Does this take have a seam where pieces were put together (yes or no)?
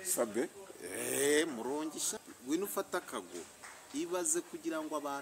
yes